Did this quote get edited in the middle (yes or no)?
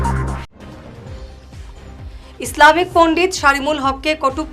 yes